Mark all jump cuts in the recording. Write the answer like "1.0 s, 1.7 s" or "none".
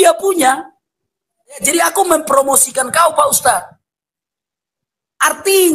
1.6 s